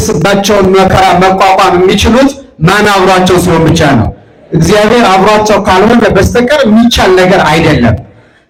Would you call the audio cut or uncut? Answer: uncut